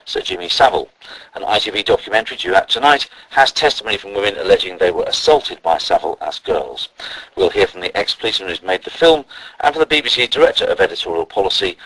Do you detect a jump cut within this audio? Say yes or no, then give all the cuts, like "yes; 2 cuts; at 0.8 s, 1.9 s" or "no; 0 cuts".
yes; 1 cut; at 6.8 s